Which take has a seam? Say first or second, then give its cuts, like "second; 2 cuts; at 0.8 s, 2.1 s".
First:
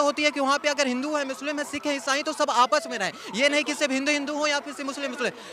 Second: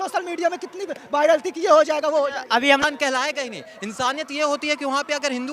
second; 1 cut; at 2.8 s